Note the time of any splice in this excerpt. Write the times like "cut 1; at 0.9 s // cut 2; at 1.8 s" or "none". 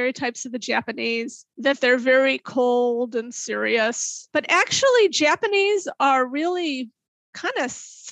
cut 1; at 1.4 s // cut 2; at 4.1 s

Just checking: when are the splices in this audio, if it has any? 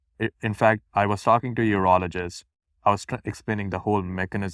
cut 1; at 2.6 s

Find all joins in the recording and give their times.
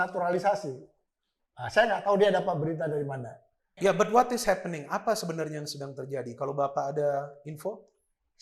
cut 1; at 3.7 s

